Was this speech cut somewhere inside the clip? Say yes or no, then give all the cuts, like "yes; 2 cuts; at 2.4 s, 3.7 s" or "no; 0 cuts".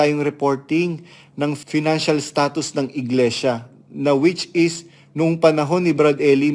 yes; 1 cut; at 1.6 s